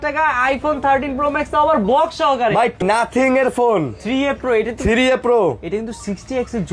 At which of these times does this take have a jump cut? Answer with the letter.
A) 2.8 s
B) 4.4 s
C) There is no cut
A